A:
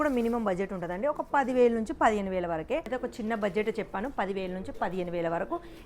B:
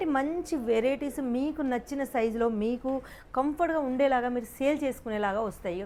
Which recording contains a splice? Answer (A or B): A